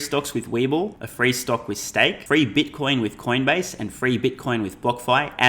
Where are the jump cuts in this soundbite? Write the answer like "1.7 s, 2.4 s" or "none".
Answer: 1.0 s, 2.2 s

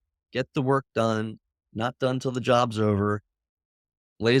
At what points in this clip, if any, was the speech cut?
none

